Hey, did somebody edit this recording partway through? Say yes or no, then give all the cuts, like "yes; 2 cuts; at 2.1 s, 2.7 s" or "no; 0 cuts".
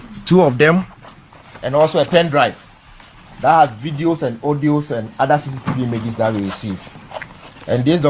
no; 0 cuts